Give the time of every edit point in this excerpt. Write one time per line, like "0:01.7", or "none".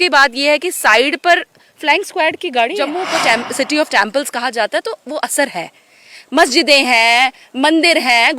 0:02.9